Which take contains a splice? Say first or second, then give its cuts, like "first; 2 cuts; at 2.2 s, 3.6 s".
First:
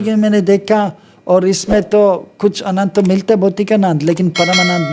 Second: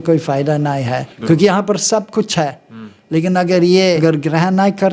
second; 2 cuts; at 1.1 s, 4.0 s